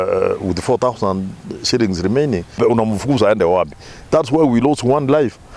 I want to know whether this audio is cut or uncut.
cut